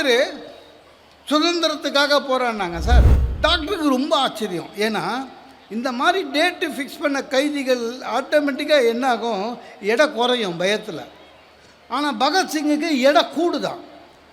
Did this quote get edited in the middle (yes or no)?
yes